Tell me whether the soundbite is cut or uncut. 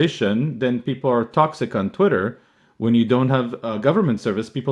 uncut